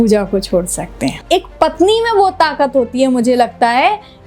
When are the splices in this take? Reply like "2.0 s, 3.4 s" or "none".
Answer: 1.2 s